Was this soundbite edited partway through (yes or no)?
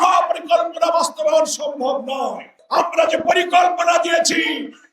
yes